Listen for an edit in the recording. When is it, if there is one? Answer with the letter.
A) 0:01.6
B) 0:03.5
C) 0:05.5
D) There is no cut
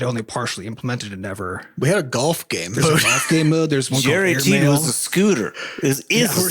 A